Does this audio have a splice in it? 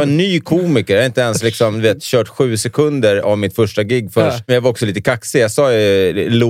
yes; 1 cut; at 4.4 s

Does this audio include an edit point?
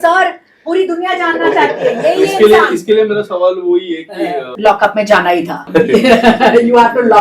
yes; 2 cuts; at 4.5 s, 5.7 s

